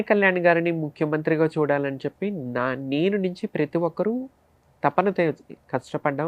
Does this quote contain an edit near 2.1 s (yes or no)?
no